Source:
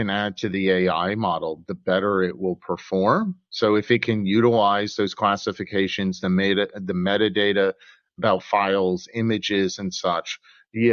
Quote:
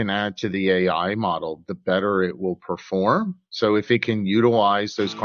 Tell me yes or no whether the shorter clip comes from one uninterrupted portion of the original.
yes